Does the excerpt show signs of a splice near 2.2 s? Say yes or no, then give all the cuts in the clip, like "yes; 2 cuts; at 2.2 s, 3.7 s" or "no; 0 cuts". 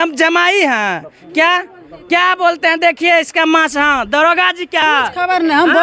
no; 1 cut; at 4.8 s